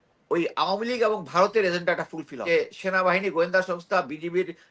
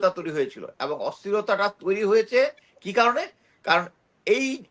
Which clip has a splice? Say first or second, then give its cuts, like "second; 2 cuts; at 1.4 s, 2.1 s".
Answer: first; 1 cut; at 2.4 s